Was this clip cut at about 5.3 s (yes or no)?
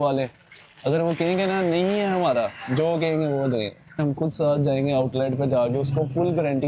no